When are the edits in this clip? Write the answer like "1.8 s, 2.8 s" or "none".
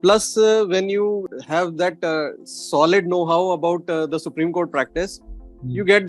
1.3 s